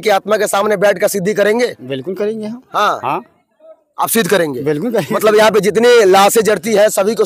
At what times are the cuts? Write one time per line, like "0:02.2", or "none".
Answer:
none

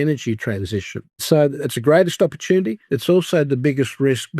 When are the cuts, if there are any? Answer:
0:01.3

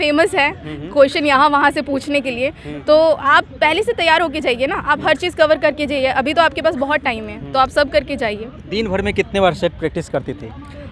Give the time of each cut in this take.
none

